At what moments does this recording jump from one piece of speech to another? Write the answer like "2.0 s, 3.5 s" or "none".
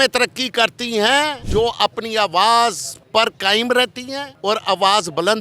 1.4 s, 2.9 s, 4.2 s